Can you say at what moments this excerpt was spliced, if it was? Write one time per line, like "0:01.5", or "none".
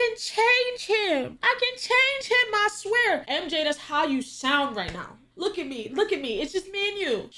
0:03.3